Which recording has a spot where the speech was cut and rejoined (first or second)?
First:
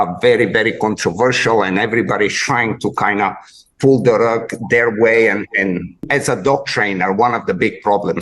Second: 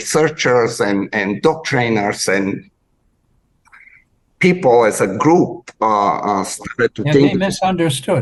first